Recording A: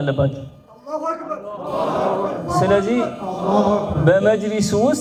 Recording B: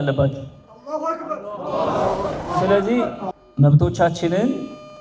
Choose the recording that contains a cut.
B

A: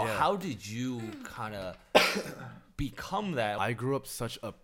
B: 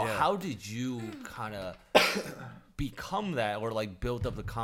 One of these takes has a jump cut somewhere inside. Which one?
A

